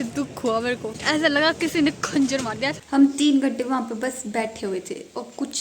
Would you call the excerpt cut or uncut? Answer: cut